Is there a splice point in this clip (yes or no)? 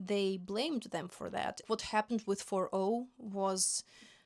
yes